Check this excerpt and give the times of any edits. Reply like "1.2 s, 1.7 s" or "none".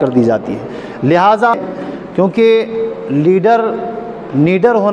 1.6 s